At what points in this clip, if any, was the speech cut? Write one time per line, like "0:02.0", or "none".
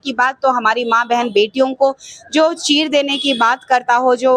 none